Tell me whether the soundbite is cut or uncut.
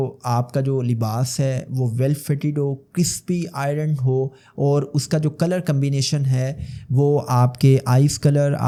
uncut